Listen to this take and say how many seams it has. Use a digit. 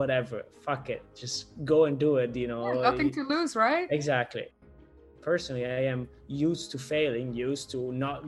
1